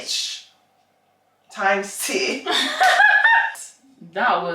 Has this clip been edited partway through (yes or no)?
yes